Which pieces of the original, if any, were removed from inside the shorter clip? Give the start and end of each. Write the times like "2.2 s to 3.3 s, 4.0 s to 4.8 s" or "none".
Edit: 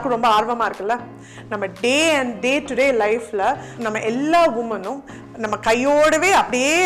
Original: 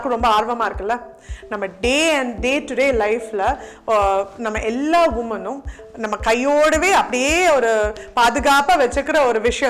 3.7 s to 4.3 s